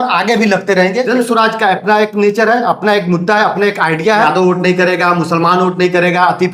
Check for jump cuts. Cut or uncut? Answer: cut